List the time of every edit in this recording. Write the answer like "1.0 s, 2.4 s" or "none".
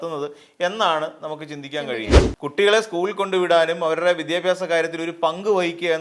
2.2 s